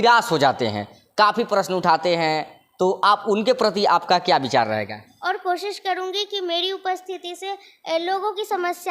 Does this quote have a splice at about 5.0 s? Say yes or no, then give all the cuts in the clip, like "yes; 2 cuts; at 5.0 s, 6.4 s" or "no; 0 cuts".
yes; 1 cut; at 5.0 s